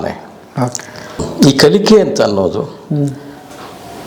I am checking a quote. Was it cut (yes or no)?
yes